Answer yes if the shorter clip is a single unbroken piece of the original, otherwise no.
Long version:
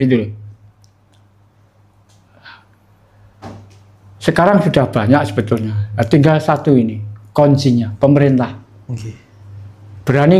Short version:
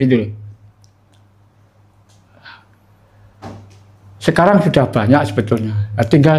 yes